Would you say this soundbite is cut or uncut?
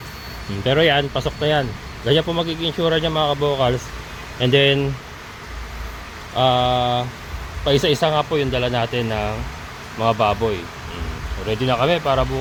uncut